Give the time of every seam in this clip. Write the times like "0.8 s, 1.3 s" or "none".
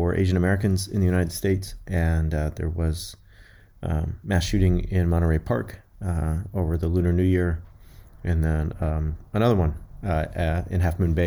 none

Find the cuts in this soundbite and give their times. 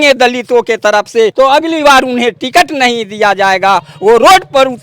1.3 s

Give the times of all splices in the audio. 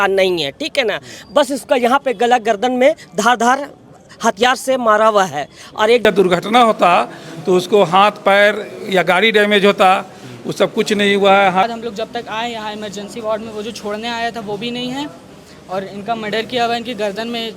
6.0 s, 11.6 s

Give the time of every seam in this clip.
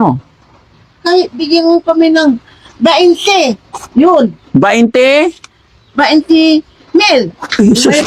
none

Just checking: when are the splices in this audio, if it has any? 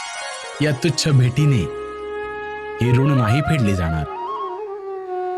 4.3 s

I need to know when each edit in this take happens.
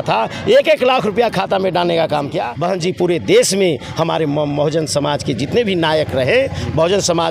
2.5 s

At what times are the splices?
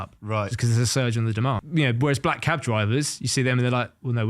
1.6 s

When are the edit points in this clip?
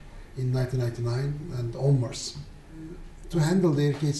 1.9 s

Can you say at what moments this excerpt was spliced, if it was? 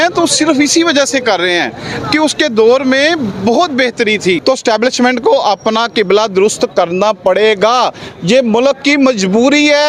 4.4 s

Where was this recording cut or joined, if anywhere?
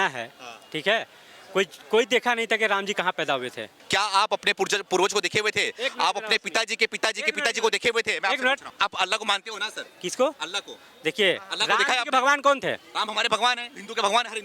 3.7 s, 8.7 s

